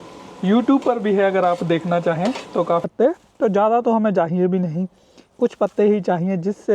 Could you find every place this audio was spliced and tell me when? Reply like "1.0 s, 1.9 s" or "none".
2.9 s